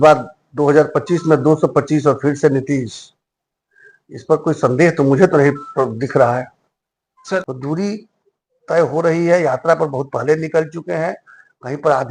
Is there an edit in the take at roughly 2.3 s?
no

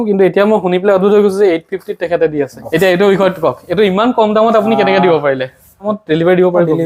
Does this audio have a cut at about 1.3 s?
no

